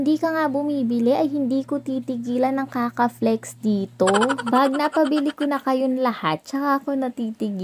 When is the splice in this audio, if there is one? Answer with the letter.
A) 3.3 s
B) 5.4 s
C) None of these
C